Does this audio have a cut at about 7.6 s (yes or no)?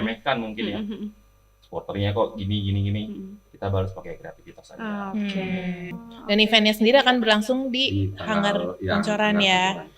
no